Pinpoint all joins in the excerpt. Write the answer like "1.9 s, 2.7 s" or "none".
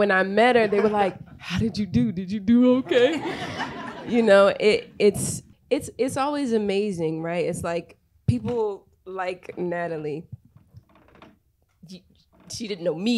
5.3 s

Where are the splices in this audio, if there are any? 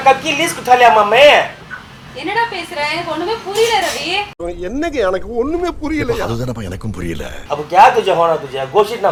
none

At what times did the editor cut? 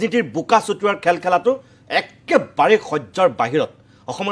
none

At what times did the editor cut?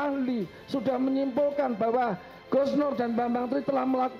none

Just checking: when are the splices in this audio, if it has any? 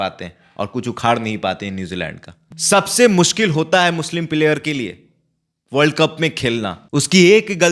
2.5 s, 6.8 s

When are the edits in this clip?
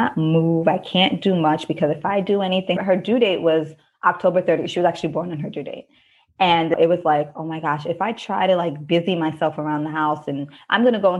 2.8 s, 6.7 s

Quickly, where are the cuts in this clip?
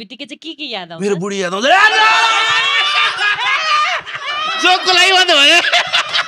none

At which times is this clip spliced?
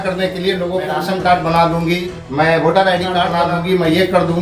0.9 s, 2.0 s, 3.4 s

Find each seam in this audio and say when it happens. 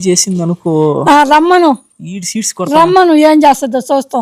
none

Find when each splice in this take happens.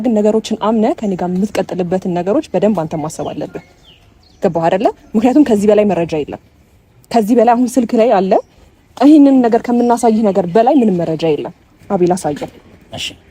11.7 s

